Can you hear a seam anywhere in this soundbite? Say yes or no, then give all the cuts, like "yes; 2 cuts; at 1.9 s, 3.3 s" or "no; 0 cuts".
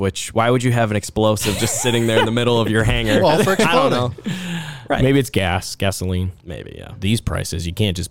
no; 0 cuts